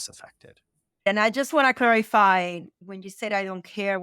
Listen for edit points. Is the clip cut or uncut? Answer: cut